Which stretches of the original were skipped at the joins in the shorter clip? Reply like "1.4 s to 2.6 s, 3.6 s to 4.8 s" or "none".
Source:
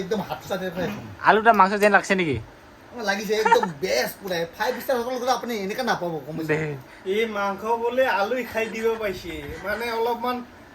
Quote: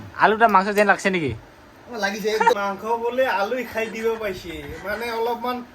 3.6 s to 7.4 s